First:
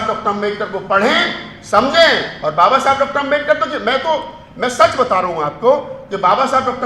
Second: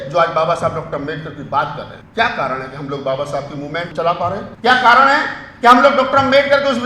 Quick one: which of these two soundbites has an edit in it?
second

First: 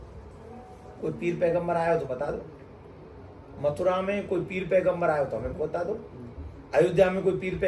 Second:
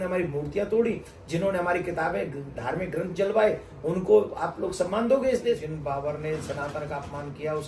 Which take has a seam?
second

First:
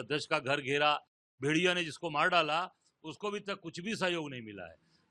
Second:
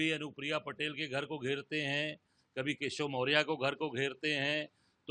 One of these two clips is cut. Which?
first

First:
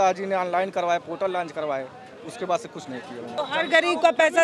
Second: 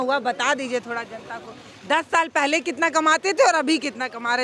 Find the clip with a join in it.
first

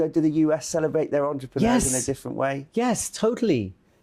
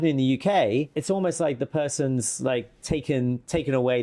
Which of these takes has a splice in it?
second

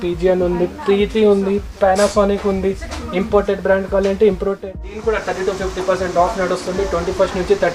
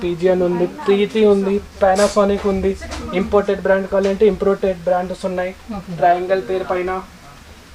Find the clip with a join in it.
first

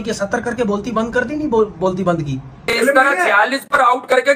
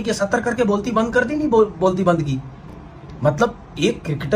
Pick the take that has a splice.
first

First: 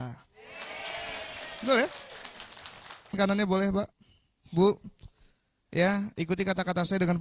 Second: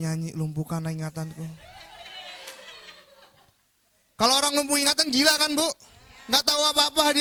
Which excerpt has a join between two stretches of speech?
first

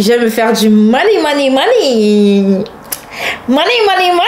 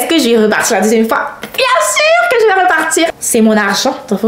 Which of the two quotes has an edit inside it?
second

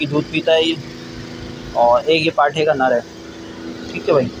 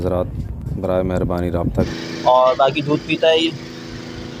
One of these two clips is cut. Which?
second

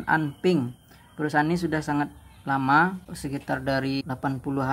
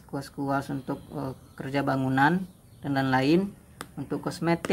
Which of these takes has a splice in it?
first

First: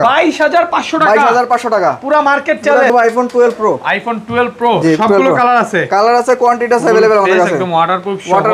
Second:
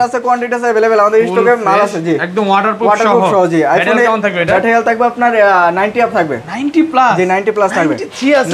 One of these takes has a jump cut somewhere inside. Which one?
first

